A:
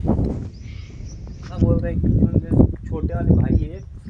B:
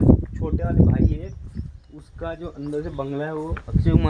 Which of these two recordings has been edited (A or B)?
A